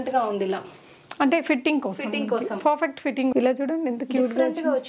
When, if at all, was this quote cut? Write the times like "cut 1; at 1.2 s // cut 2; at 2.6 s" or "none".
cut 1; at 3.3 s